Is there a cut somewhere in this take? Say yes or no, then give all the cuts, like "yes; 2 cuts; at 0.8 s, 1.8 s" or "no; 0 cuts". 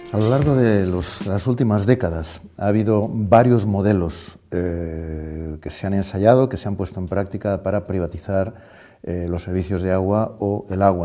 yes; 1 cut; at 9.7 s